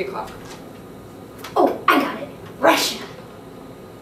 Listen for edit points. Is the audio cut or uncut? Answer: uncut